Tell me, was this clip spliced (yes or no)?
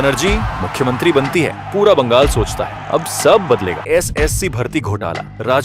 yes